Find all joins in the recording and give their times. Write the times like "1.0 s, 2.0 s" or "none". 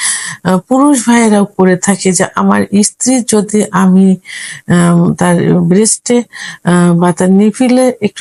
none